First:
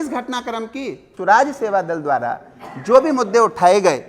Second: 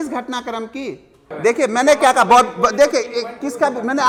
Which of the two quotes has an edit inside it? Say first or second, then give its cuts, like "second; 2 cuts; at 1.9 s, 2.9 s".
first; 1 cut; at 1.1 s